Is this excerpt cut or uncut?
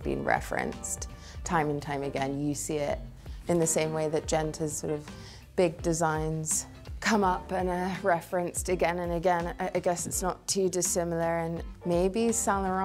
uncut